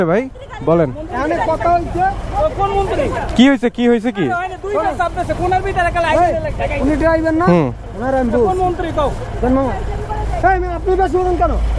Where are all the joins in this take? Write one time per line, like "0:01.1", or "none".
none